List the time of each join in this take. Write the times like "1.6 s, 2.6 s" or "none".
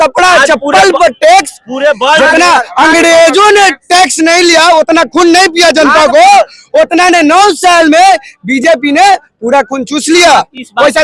none

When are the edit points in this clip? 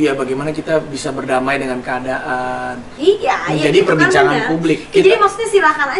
2.8 s

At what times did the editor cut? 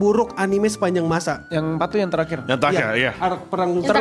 none

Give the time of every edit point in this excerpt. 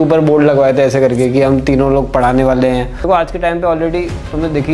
2.9 s

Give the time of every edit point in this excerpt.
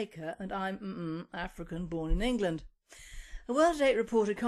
1.5 s

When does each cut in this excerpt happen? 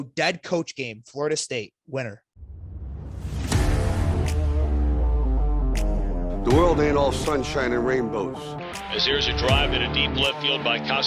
2.2 s

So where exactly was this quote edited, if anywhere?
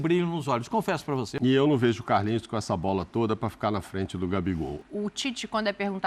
1.3 s, 4.8 s

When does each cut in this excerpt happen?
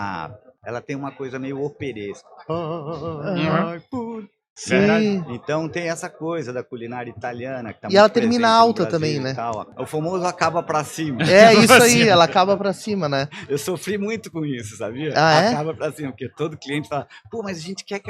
9.7 s

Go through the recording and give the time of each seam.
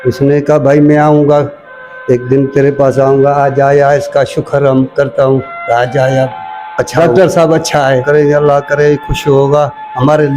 6.9 s, 8.0 s

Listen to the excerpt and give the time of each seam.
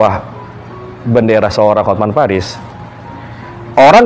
none

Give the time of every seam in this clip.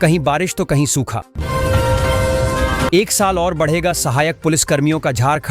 1.3 s, 2.9 s

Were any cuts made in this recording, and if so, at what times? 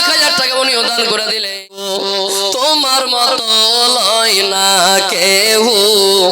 1.8 s

